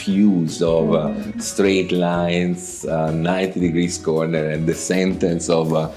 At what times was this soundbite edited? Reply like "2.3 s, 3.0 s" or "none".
none